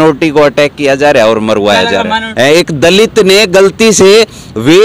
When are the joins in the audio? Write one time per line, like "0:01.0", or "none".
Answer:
0:02.3